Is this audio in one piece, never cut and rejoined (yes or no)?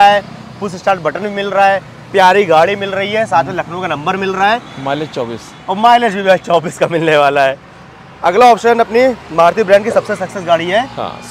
yes